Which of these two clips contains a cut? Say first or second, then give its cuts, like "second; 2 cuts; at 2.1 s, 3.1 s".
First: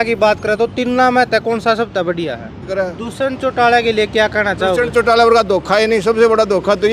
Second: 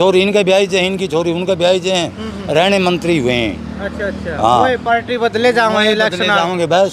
first; 1 cut; at 2.7 s